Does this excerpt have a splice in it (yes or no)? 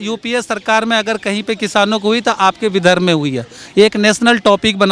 no